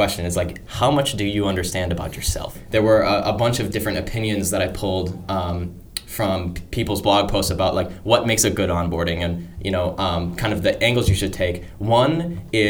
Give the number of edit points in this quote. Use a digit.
1